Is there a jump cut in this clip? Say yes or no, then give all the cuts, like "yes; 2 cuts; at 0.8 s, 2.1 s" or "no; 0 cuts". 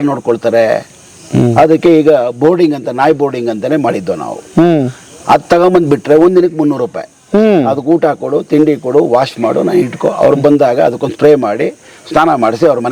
no; 0 cuts